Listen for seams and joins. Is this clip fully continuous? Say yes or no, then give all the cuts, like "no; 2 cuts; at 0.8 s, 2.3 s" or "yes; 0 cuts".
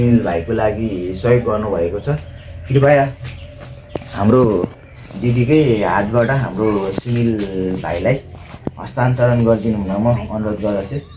yes; 0 cuts